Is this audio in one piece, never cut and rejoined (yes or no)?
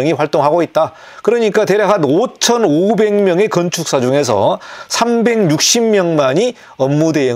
yes